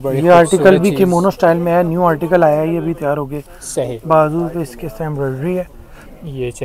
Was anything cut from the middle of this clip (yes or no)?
no